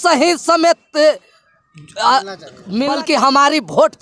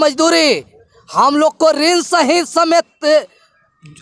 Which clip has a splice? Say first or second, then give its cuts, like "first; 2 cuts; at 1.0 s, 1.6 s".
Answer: first; 1 cut; at 2.9 s